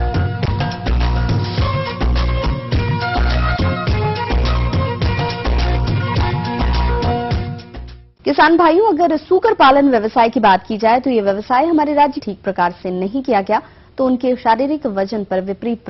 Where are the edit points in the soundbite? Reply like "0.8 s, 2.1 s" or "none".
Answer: none